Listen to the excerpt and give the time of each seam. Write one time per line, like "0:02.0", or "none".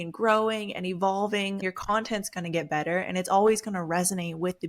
0:01.6